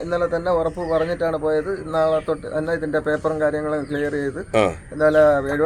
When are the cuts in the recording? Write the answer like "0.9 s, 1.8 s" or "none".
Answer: none